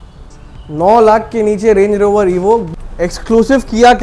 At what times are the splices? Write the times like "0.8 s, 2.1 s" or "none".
2.7 s